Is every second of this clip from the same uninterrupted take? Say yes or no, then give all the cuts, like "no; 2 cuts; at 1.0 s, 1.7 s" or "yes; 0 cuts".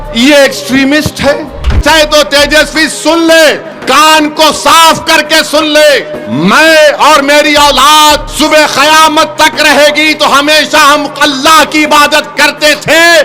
no; 4 cuts; at 1.8 s, 3.7 s, 5.9 s, 8.3 s